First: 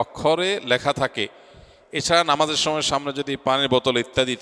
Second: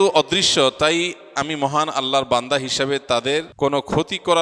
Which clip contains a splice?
second; 1 cut; at 3.5 s

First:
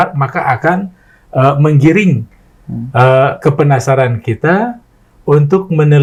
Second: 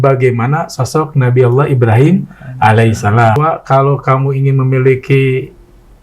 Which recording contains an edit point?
second; 1 cut; at 3.4 s

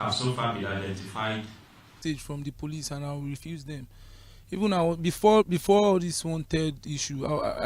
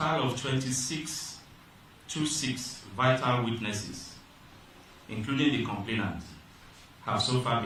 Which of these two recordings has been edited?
first; 1 cut; at 2.0 s

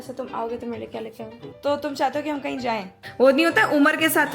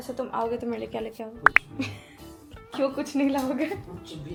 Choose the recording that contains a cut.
first; 2 cuts; at 1.3 s, 2.9 s

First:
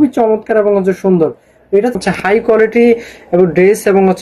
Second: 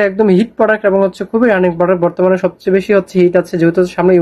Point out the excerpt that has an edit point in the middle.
first; 1 cut; at 2.0 s

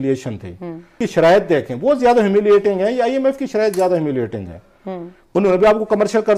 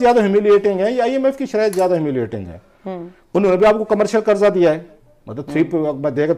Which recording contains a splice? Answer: first; 1 cut; at 1.0 s

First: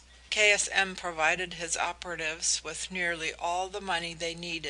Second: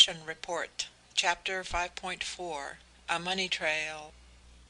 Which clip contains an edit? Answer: first; 1 cut; at 3.7 s

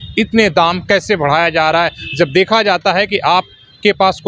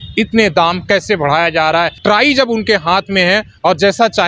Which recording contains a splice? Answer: second; 1 cut; at 2.0 s

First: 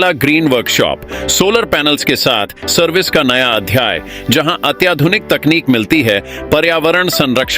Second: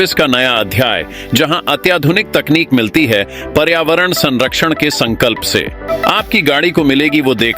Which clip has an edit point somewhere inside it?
second; 1 cut; at 5.9 s

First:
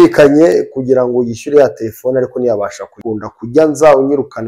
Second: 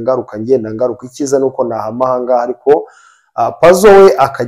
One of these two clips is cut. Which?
first; 1 cut; at 3.0 s

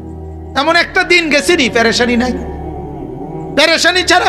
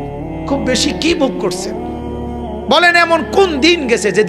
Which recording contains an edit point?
second; 2 cuts; at 1.4 s, 2.7 s

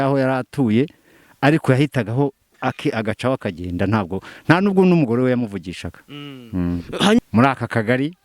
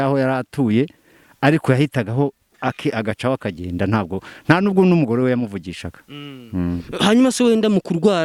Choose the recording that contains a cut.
first; 1 cut; at 7.2 s

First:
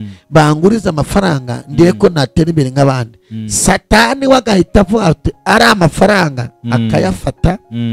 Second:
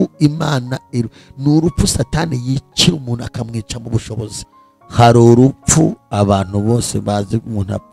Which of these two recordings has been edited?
second; 1 cut; at 4.4 s

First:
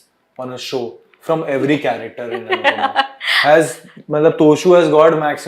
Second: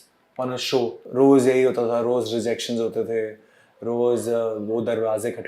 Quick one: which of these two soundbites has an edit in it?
second; 1 cut; at 1.0 s

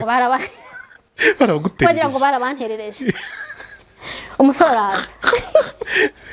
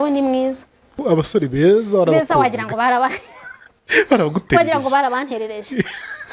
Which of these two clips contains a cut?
second; 1 cut; at 1.0 s

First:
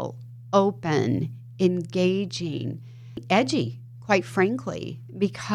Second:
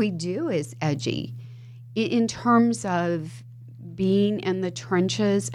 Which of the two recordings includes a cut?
first; 1 cut; at 3.2 s

